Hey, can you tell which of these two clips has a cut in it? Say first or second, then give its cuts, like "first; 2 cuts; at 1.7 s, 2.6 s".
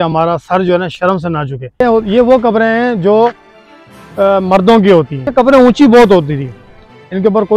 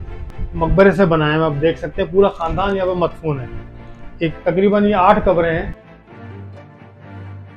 first; 2 cuts; at 1.8 s, 5.1 s